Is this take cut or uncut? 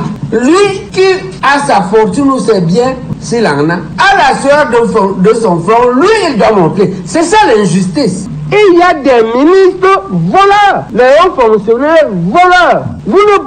cut